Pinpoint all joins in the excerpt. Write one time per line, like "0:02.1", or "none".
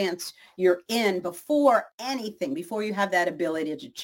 0:01.9